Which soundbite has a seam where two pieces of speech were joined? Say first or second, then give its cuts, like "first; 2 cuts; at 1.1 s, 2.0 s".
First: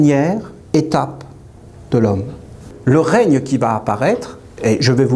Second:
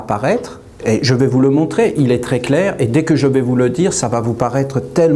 first; 1 cut; at 2.7 s